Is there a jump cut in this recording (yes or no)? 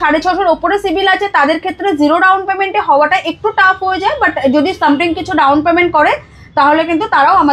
no